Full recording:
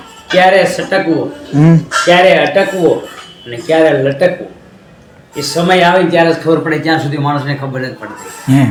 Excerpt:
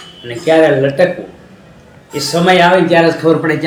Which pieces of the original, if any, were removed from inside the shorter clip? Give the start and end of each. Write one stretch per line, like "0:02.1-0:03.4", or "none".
none